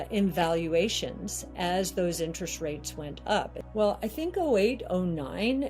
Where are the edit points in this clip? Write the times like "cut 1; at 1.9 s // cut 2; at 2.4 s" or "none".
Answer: cut 1; at 3.6 s